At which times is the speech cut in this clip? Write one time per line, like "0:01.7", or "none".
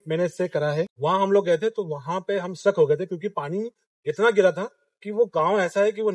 0:00.9